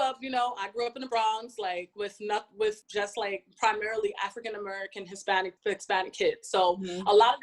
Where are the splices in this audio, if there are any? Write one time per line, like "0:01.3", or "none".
0:01.9
0:02.8
0:05.6

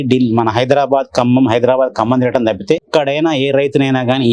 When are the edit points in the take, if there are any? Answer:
0:02.9

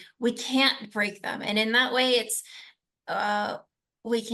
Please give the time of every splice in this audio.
none

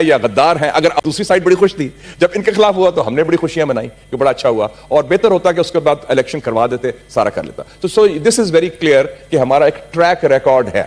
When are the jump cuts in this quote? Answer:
0:01.0

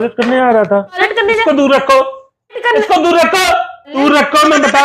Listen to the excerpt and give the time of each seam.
0:01.0
0:02.6
0:04.0

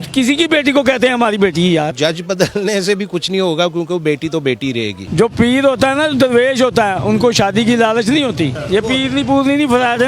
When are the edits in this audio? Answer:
0:01.9
0:05.0
0:08.6

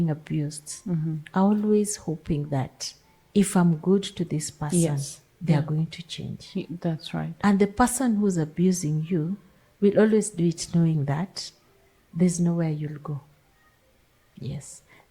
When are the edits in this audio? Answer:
none

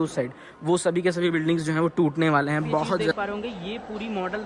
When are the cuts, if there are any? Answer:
0:03.1

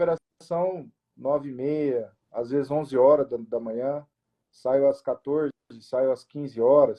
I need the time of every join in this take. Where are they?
none

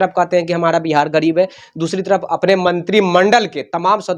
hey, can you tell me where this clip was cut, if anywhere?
none

